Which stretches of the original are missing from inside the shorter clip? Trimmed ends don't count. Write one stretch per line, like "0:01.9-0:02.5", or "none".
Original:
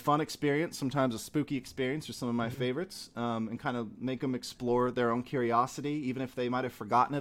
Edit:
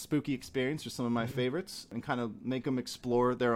0:03.1-0:03.5